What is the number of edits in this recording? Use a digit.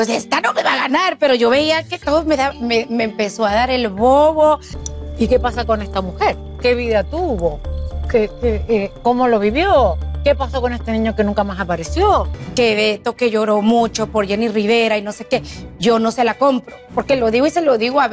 2